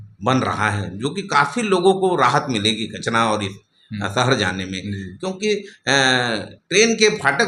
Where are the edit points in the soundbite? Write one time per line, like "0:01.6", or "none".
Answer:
none